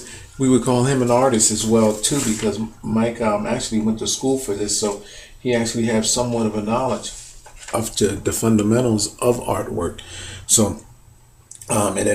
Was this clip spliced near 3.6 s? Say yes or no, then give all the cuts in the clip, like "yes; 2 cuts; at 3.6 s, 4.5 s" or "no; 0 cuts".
yes; 1 cut; at 3.6 s